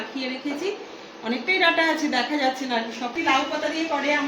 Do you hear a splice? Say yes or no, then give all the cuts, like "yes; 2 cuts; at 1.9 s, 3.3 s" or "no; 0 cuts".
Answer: yes; 1 cut; at 3.2 s